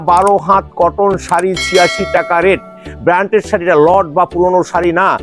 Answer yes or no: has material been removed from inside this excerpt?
no